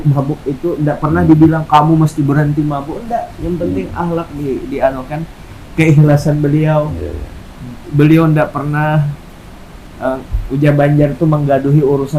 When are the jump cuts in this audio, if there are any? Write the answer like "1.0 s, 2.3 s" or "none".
none